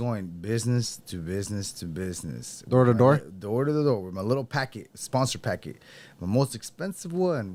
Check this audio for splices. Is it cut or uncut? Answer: uncut